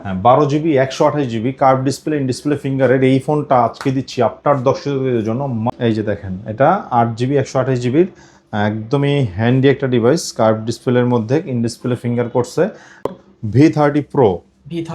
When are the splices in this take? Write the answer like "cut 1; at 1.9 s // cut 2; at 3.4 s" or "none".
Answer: cut 1; at 5.7 s // cut 2; at 13.1 s